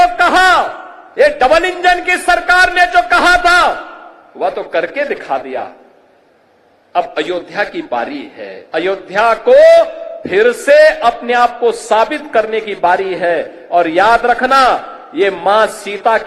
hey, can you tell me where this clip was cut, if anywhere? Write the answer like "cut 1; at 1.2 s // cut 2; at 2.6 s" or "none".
none